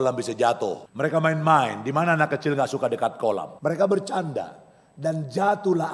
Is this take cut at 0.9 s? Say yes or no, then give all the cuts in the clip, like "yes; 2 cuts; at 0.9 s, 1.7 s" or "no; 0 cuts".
yes; 2 cuts; at 0.9 s, 3.5 s